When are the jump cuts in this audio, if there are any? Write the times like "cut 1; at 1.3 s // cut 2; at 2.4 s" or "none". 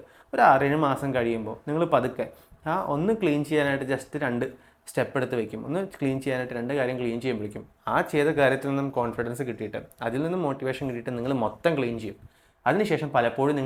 none